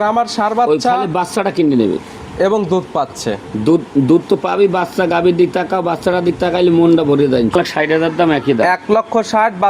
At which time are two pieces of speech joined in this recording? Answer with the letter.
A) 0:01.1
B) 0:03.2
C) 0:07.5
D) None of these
C